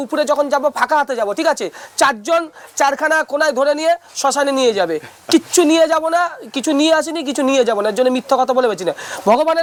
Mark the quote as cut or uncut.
uncut